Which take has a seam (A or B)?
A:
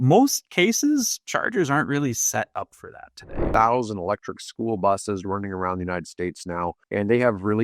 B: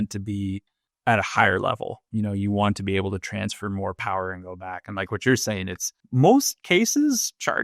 A